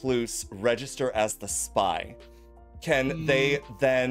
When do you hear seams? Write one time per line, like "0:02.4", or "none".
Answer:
none